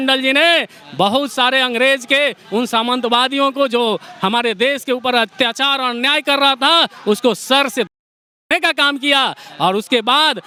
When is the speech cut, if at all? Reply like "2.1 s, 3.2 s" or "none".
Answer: none